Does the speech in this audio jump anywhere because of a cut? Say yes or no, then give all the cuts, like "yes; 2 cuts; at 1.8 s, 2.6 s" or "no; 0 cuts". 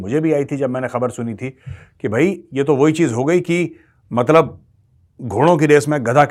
no; 0 cuts